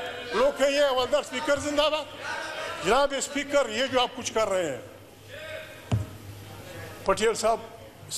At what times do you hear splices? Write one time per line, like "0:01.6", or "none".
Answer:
none

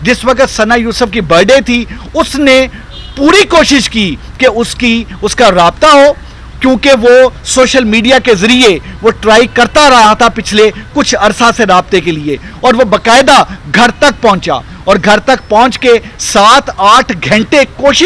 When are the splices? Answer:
none

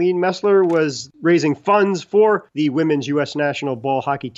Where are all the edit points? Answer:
0:01.0

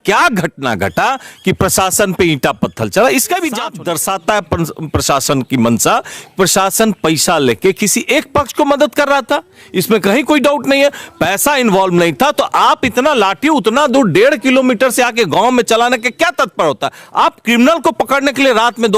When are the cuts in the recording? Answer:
0:03.7

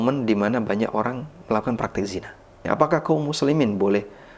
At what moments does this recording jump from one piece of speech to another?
0:02.6

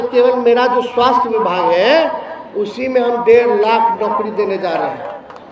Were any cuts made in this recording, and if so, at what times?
none

